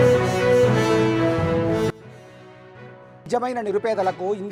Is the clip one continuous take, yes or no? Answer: no